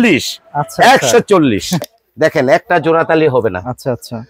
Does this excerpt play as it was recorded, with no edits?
no; 1 cut; at 1.8 s

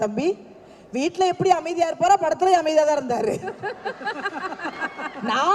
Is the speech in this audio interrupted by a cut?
no; 0 cuts

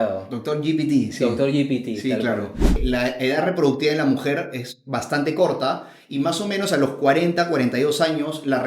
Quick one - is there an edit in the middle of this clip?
yes; 1 cut; at 2.8 s

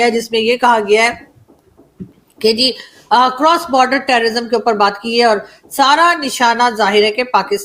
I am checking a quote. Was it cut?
no; 0 cuts

